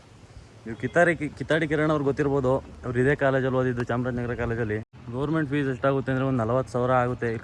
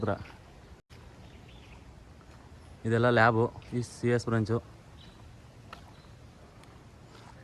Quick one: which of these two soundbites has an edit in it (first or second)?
first